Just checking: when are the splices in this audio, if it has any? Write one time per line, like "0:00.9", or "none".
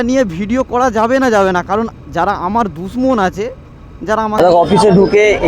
0:04.4